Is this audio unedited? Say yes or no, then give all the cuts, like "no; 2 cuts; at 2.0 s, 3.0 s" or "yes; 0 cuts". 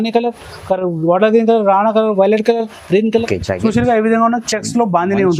no; 1 cut; at 3.3 s